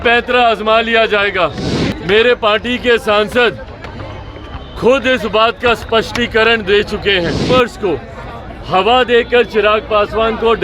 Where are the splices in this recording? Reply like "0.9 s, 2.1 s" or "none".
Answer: 7.5 s

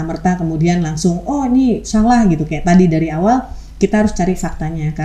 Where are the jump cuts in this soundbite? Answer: none

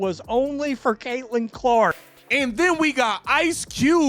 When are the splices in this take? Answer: 1.9 s

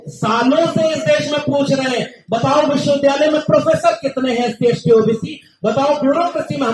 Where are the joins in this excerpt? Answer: none

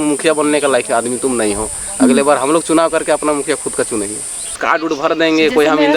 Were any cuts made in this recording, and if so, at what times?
4.6 s

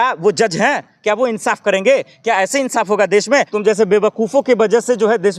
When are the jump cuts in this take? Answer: 3.5 s

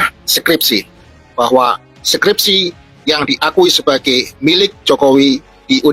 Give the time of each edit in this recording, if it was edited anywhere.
1.3 s

